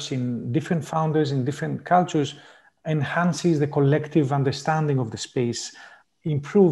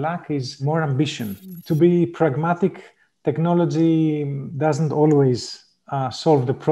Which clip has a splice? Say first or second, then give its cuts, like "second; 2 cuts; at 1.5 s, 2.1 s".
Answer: second; 2 cuts; at 1.4 s, 4.4 s